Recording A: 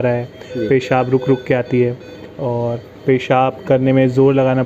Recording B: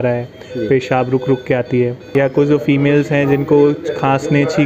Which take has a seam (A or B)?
B